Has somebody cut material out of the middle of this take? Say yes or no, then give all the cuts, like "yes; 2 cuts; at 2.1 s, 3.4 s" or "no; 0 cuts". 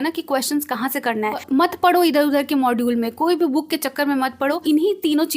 yes; 2 cuts; at 1.4 s, 4.6 s